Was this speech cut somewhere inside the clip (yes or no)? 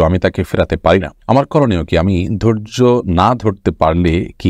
yes